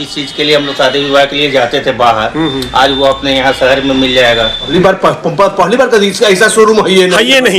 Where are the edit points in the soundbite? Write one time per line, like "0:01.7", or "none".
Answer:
0:04.6